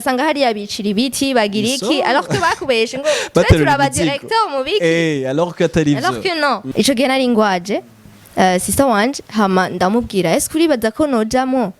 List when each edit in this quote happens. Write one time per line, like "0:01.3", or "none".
0:06.6